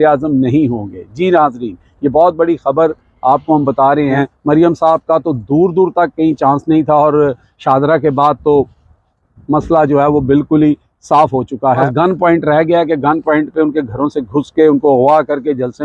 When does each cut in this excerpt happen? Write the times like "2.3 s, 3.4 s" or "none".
4.3 s, 11.9 s